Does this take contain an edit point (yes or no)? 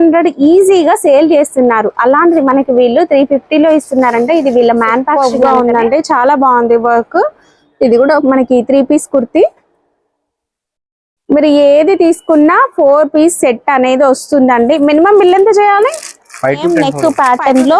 yes